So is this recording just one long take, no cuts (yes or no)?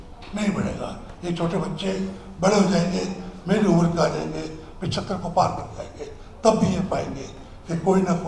yes